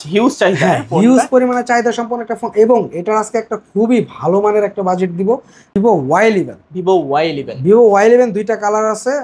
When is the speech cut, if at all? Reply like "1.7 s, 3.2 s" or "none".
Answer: 5.8 s